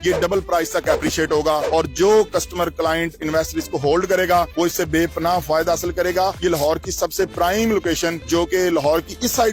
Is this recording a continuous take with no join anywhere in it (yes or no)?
yes